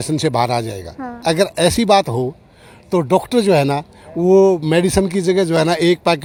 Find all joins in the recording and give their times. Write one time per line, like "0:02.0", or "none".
none